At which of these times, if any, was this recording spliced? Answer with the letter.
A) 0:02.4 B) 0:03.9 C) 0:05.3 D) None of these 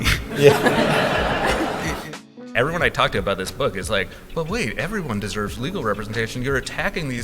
A